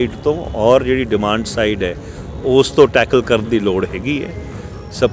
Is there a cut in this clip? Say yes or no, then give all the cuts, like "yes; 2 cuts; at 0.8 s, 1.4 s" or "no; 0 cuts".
no; 0 cuts